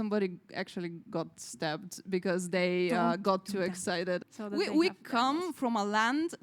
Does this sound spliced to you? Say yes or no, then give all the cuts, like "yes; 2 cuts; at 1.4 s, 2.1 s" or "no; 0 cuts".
yes; 1 cut; at 4.3 s